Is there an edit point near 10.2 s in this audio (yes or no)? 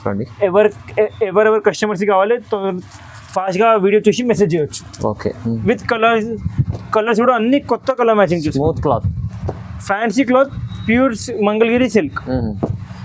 no